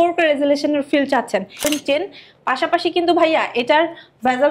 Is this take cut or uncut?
cut